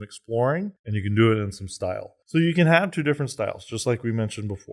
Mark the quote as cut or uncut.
cut